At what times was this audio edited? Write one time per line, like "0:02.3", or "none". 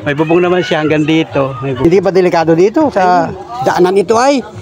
0:01.8